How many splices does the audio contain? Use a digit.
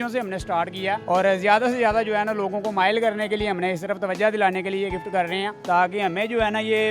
2